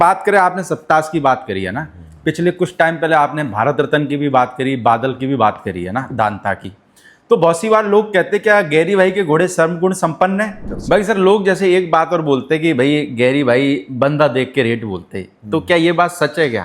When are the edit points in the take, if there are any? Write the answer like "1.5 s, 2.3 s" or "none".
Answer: 10.6 s